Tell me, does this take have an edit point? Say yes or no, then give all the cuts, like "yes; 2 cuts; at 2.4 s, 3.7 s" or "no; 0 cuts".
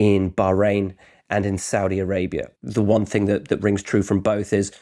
yes; 1 cut; at 2.6 s